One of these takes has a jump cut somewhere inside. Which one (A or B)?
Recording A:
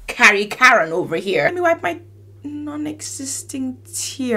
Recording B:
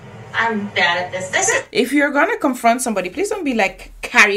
A